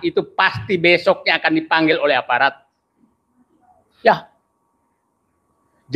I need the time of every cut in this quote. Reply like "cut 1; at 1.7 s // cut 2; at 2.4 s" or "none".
none

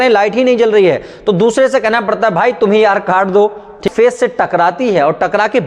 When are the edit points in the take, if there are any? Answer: cut 1; at 3.9 s

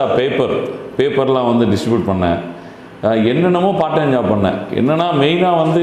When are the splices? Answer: none

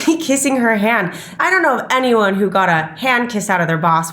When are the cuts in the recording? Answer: cut 1; at 1.2 s

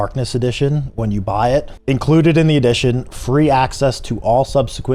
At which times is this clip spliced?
cut 1; at 1.7 s

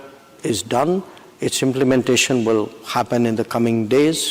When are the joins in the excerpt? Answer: none

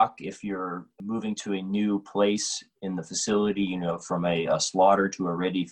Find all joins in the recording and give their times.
cut 1; at 1.0 s

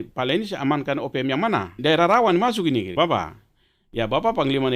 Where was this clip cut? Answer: cut 1; at 1.8 s // cut 2; at 2.9 s

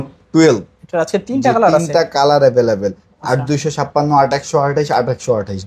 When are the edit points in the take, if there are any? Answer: none

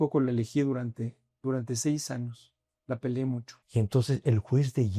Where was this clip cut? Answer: cut 1; at 3.5 s

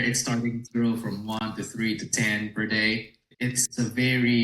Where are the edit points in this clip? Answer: cut 1; at 3.3 s

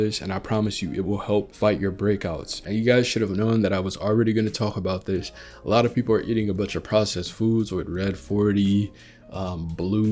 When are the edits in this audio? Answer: cut 1; at 2.5 s

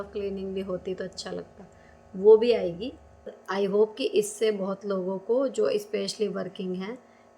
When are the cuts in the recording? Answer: cut 1; at 3.4 s

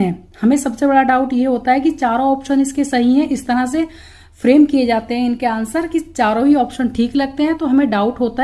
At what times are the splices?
none

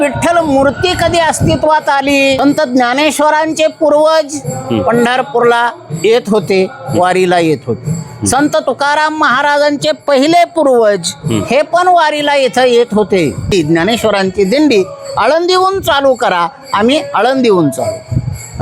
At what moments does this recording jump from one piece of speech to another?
cut 1; at 2.4 s // cut 2; at 13.5 s

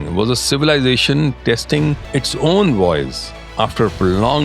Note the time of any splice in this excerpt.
cut 1; at 2.0 s

